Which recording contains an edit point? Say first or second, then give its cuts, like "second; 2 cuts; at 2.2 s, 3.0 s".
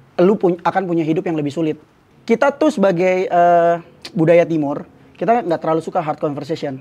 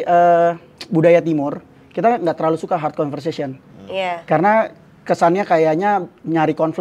first; 1 cut; at 2.1 s